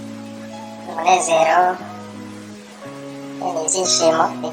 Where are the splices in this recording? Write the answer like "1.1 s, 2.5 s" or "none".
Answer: 0.9 s, 1.8 s, 3.4 s